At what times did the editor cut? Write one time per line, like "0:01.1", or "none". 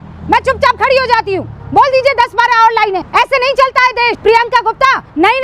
0:03.1
0:04.2